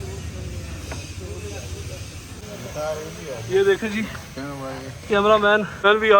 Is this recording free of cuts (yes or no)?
no